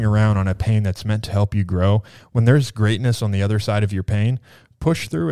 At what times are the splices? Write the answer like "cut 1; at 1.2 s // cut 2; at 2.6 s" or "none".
none